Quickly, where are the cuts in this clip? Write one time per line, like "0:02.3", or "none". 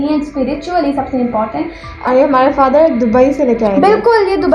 0:01.8

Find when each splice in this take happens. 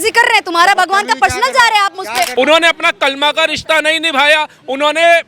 0:02.3

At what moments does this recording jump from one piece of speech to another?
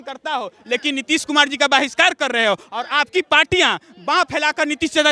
none

